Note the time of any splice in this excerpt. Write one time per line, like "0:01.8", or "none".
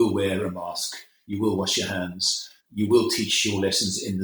0:02.6